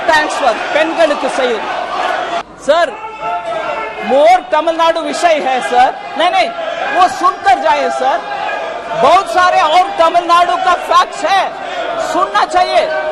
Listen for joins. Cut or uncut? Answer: cut